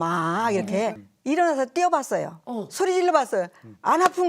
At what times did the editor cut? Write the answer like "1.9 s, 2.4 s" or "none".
1.0 s